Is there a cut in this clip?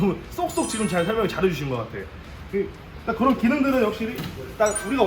no; 0 cuts

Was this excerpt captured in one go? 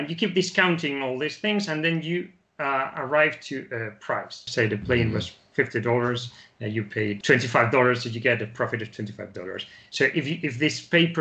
no; 2 cuts; at 4.5 s, 7.2 s

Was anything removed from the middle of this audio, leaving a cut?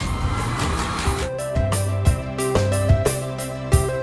yes; 1 cut; at 1.1 s

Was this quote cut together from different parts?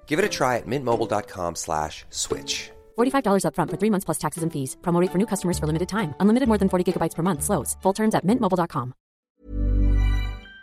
yes; 1 cut; at 9.3 s

